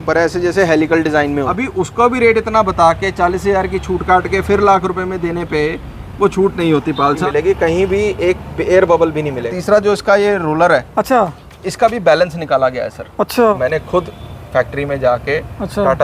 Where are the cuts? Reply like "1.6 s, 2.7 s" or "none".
1.6 s, 7.2 s, 9.5 s, 13.6 s